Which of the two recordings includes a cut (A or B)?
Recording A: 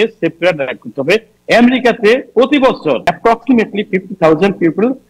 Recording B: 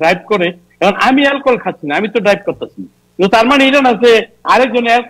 A